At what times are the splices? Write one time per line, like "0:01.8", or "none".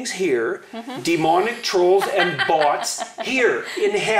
none

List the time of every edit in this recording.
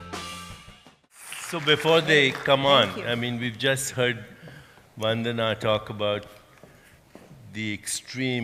0:03.8

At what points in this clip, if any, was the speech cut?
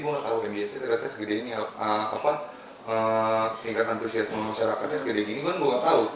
none

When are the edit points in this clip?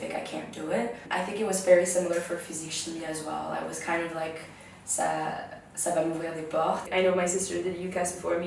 0:01.0
0:06.8

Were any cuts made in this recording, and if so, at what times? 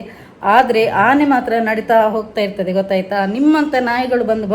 none

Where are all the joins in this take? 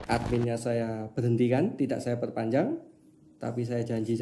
none

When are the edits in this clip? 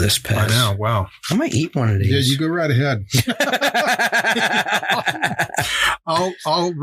0:01.2

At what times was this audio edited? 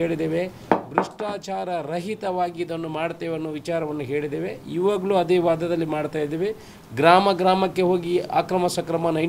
none

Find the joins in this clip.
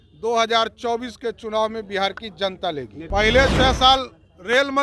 0:03.0

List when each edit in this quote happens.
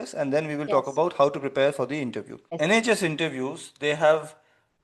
0:02.6

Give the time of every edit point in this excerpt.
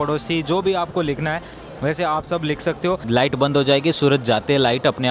0:03.0

